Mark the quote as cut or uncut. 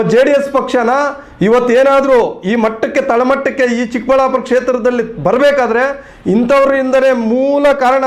uncut